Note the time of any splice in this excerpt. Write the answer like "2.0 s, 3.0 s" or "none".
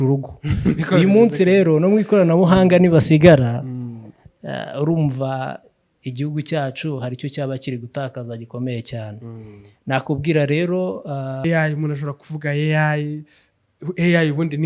11.4 s